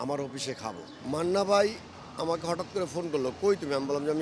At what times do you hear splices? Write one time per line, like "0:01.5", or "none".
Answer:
0:00.9